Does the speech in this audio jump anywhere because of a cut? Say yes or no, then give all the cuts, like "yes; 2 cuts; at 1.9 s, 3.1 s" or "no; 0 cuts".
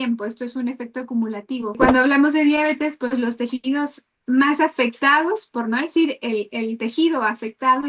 yes; 1 cut; at 1.8 s